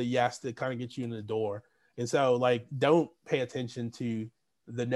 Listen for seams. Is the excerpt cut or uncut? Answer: uncut